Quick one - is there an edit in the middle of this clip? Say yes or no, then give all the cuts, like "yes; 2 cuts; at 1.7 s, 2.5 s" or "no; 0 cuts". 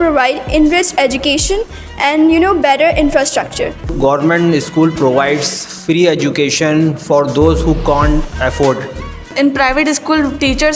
yes; 2 cuts; at 3.9 s, 9.3 s